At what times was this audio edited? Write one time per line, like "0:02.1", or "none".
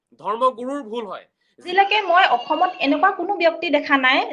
0:01.7